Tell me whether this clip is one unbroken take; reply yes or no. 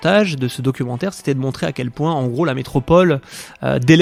yes